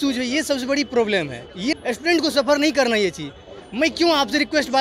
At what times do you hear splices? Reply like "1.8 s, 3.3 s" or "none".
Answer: 1.7 s

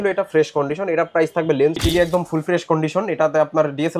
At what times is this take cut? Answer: 1.8 s

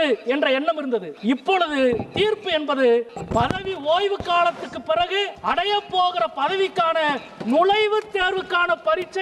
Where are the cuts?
1.1 s, 3.2 s, 5.3 s

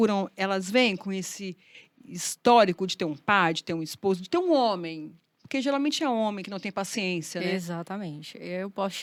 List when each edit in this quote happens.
none

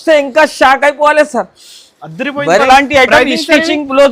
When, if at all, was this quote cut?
2.6 s

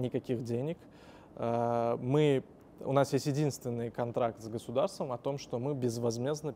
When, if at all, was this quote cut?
none

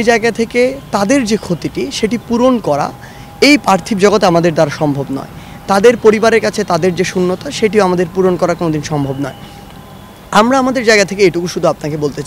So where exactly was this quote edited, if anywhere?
none

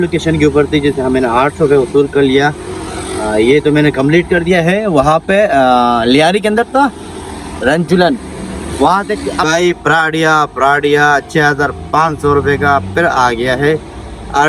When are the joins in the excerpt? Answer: 9.4 s

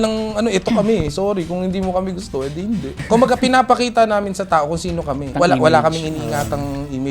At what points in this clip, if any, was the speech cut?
3.0 s, 5.3 s

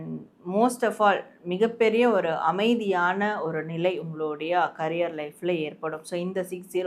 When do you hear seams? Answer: none

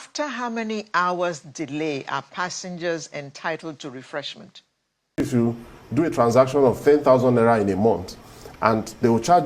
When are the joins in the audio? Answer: 5.2 s

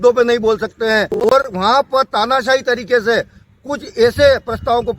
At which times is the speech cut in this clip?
1.5 s

